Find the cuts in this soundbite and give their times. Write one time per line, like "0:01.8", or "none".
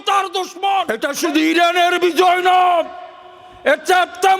0:00.9